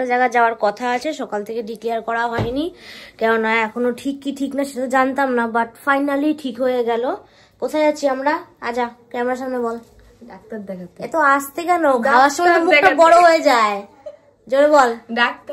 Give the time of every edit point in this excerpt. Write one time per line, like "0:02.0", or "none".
none